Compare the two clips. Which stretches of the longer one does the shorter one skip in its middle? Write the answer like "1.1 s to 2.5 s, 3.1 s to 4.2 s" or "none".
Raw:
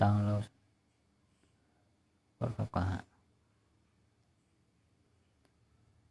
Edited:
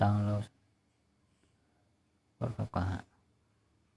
none